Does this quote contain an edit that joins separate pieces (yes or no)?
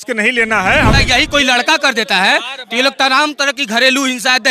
yes